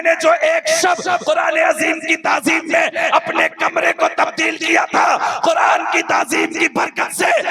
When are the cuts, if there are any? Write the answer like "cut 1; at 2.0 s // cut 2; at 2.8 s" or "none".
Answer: none